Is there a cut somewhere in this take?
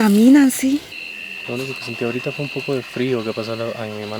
yes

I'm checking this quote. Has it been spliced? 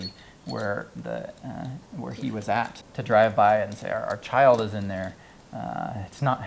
yes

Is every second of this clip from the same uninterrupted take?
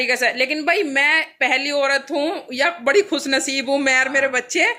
yes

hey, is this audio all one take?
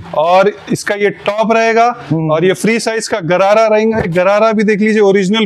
yes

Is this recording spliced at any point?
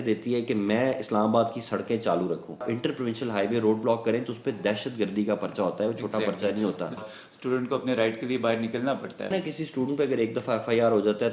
yes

